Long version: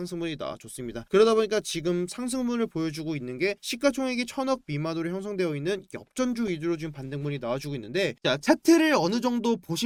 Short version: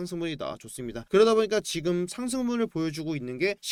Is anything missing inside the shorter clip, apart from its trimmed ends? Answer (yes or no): no